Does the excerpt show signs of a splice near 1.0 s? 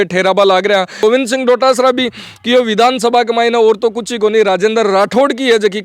yes; 1 cut; at 1.0 s

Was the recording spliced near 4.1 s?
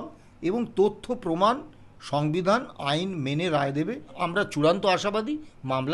yes; 1 cut; at 4.1 s

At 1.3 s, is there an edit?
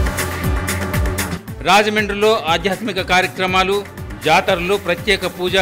yes; 1 cut; at 1.3 s

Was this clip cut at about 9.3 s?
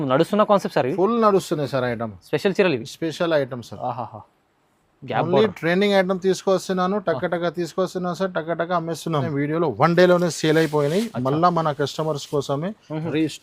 yes; 1 cut; at 9.3 s

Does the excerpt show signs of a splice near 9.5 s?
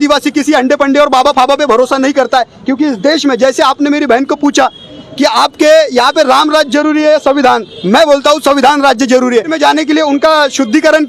yes; 1 cut; at 9.5 s

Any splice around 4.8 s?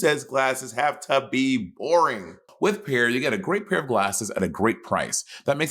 no; 1 cut; at 2.5 s

